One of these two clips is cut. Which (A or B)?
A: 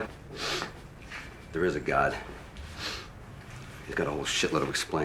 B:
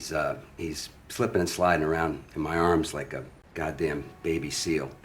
B